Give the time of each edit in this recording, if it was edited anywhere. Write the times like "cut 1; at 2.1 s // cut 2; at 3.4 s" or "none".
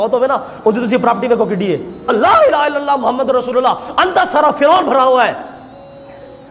cut 1; at 2.1 s